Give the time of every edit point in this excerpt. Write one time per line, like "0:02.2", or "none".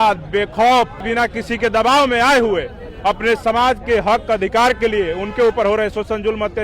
0:01.0